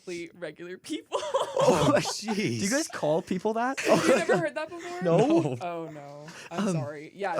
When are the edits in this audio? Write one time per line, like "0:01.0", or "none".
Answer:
0:03.8